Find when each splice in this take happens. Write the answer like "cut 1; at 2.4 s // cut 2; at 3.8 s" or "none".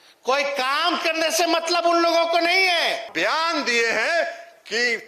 cut 1; at 3.1 s